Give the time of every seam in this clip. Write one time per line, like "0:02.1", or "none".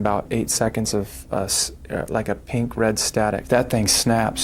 0:03.4